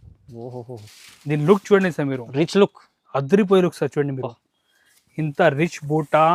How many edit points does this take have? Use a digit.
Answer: 0